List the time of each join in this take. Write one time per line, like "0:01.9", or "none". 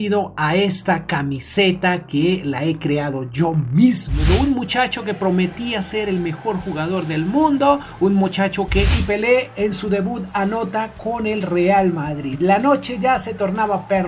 0:04.1
0:09.0

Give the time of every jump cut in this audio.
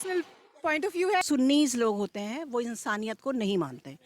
0:01.2

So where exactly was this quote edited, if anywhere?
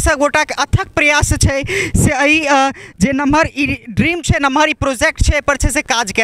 none

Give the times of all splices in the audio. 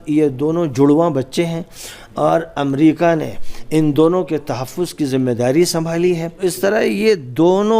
0:06.4

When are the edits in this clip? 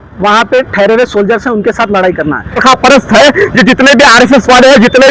0:02.6

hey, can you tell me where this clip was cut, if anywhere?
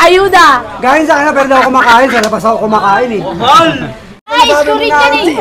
0:04.3

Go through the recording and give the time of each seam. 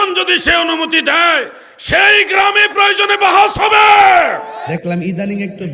0:04.6

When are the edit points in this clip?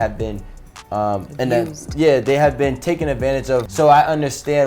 0:03.7

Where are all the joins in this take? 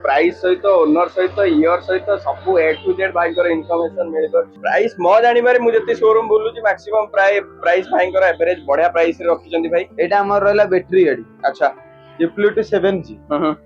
0:04.5

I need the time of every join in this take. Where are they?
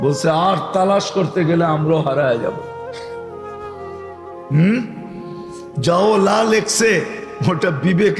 0:03.0
0:04.5

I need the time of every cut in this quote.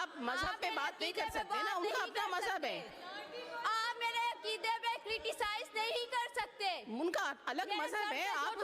none

